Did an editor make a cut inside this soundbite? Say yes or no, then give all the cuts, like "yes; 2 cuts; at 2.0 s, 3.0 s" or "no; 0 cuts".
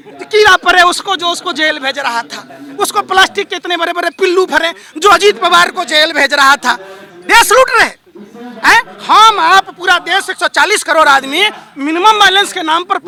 no; 0 cuts